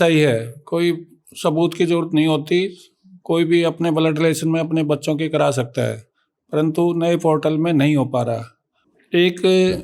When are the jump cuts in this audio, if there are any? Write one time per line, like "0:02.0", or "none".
none